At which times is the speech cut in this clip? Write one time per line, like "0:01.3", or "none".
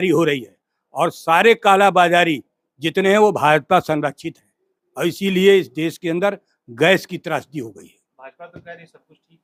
none